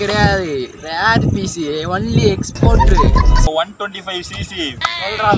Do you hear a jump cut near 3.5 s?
yes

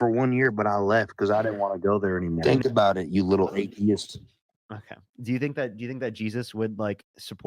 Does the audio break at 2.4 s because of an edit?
yes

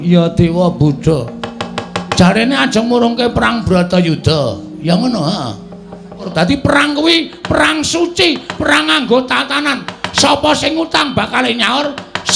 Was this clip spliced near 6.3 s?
yes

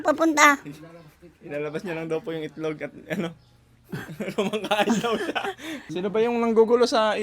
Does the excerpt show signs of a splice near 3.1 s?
no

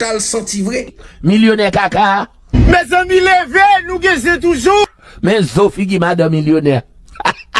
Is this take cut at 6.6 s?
no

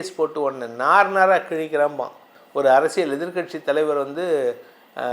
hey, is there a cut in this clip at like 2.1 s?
no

